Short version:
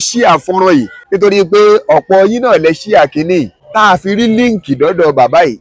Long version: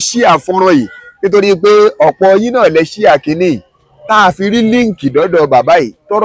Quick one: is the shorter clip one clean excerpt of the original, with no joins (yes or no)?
no